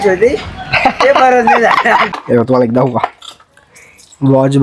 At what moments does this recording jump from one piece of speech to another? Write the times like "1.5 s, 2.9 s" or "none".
2.1 s